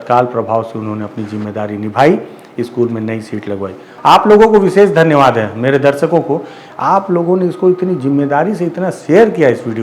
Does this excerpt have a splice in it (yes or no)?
yes